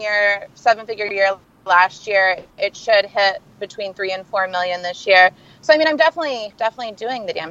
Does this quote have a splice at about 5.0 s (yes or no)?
no